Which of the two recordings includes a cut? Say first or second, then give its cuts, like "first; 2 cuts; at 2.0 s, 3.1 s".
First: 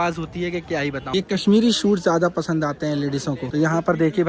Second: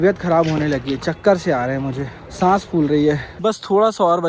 first; 1 cut; at 1.0 s